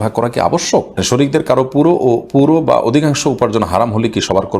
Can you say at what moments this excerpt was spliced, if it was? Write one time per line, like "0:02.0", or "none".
0:01.0